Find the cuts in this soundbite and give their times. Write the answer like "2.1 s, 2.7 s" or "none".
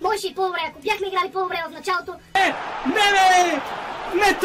2.3 s